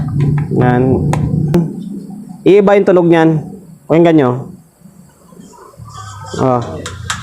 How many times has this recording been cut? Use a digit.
1